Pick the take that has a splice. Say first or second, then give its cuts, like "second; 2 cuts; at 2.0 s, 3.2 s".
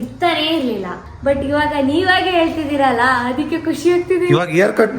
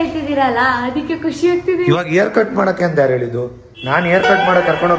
first; 1 cut; at 1.0 s